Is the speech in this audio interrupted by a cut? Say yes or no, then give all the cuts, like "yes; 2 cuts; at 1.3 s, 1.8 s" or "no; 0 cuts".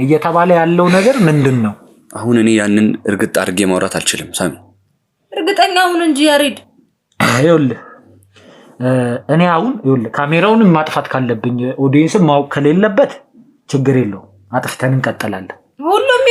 no; 0 cuts